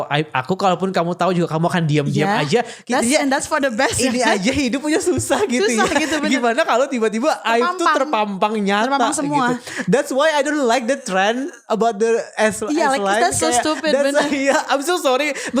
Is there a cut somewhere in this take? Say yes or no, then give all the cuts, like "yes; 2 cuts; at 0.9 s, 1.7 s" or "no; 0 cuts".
no; 0 cuts